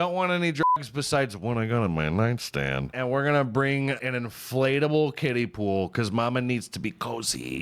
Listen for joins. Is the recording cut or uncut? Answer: cut